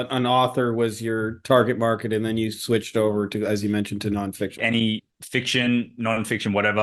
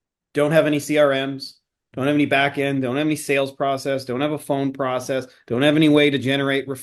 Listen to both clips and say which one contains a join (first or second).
first